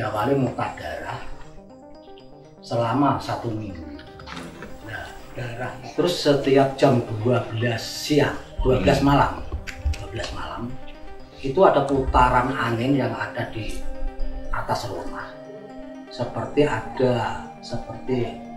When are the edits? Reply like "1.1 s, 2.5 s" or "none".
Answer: 5.8 s